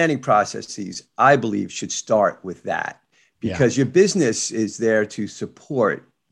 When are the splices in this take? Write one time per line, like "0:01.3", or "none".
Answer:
none